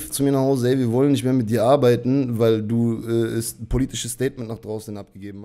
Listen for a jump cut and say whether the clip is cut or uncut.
uncut